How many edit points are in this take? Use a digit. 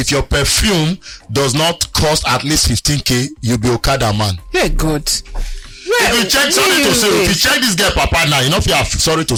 0